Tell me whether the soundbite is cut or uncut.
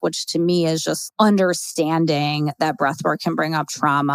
cut